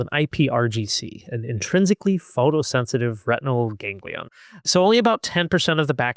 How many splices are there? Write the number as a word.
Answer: one